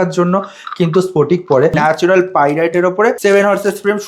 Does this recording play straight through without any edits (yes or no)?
no